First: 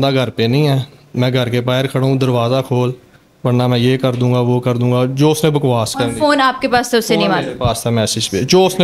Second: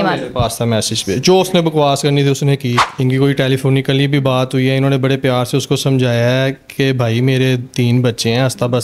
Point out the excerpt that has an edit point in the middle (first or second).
second